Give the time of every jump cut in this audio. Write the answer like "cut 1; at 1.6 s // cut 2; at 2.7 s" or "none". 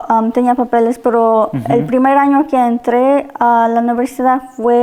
none